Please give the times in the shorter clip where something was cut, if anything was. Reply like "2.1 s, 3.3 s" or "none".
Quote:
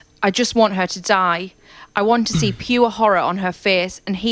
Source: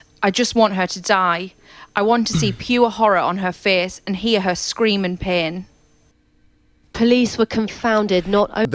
none